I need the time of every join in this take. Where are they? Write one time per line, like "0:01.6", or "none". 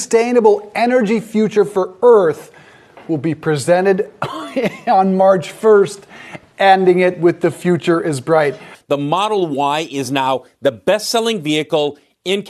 0:08.8